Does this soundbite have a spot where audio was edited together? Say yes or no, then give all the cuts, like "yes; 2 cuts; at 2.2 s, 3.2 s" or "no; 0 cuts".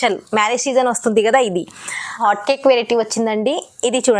yes; 1 cut; at 2.2 s